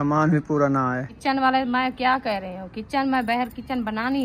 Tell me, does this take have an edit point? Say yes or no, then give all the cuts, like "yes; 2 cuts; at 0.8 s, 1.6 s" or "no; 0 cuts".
yes; 1 cut; at 1.1 s